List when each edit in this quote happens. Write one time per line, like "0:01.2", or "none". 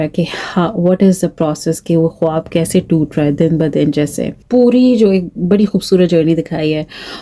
0:04.4